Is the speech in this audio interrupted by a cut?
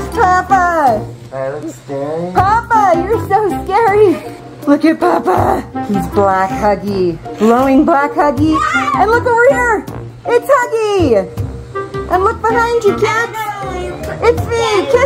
no; 0 cuts

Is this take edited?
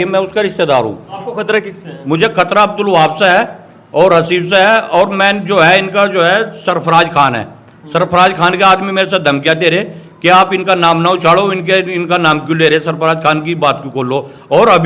yes; 1 cut; at 1.2 s

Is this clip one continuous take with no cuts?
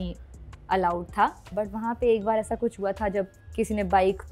no; 1 cut; at 1.4 s

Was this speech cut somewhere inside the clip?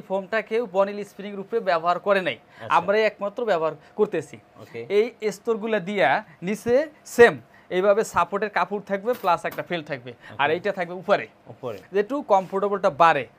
no; 0 cuts

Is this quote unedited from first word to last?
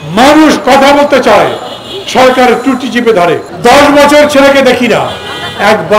no; 1 cut; at 3.5 s

